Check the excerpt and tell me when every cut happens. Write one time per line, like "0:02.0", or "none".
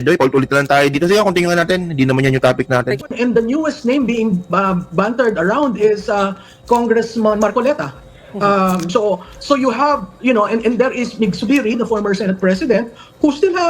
0:03.0